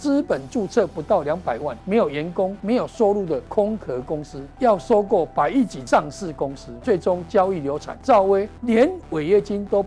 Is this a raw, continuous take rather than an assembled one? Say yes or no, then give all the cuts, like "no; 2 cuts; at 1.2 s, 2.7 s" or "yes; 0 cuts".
no; 8 cuts; at 1.7 s, 2.6 s, 3.5 s, 4.4 s, 5.8 s, 6.7 s, 7.9 s, 8.5 s